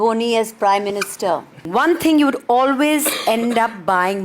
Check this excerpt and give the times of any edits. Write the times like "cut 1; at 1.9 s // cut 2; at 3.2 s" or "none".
cut 1; at 1.6 s